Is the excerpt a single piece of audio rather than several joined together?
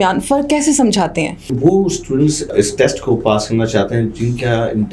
no; 1 cut; at 1.4 s

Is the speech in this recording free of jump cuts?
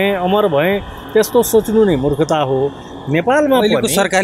yes; 0 cuts

